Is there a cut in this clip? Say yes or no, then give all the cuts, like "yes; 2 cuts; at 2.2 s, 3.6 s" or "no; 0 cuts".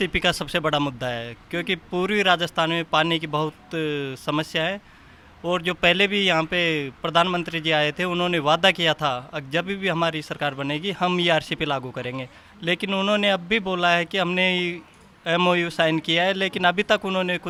no; 0 cuts